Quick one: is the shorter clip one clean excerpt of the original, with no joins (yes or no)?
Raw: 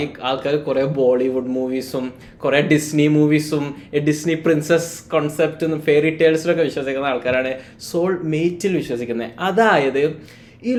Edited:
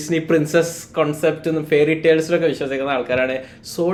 yes